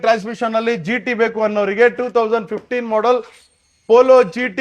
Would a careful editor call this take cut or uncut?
uncut